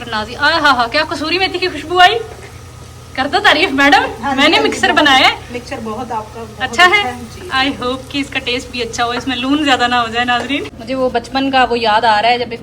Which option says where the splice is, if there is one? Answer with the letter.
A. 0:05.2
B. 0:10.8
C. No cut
B